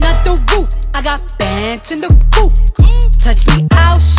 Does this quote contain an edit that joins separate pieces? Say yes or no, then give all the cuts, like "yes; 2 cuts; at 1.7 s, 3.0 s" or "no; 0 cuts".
no; 0 cuts